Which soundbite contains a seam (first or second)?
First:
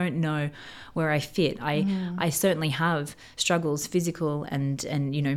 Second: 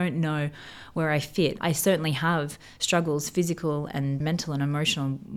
second